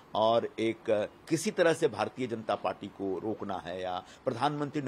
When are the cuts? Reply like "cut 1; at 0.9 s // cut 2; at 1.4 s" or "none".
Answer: none